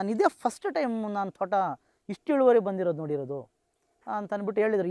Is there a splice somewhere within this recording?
no; 0 cuts

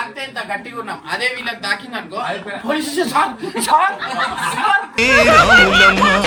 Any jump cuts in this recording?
no; 0 cuts

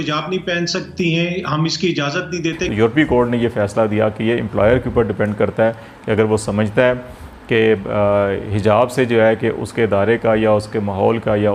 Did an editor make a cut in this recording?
yes; 1 cut; at 2.6 s

